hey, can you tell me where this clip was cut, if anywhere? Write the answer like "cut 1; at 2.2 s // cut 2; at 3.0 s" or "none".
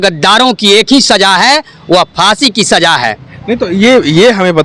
none